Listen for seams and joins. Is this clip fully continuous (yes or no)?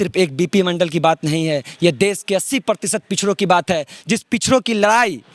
yes